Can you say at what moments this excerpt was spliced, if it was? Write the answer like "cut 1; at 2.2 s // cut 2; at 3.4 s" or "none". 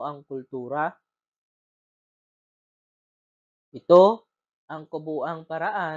cut 1; at 4.8 s